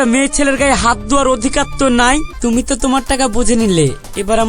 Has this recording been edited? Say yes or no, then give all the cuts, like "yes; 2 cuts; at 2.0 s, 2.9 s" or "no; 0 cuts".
yes; 1 cut; at 2.3 s